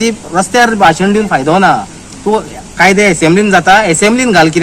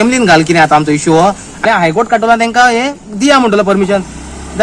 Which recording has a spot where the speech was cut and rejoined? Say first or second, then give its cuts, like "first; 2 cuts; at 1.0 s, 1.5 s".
second; 1 cut; at 1.6 s